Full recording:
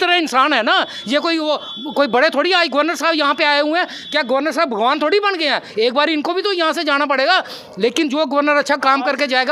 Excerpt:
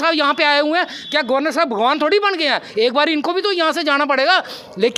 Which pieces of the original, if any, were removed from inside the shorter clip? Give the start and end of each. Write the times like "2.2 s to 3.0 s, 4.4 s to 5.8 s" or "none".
none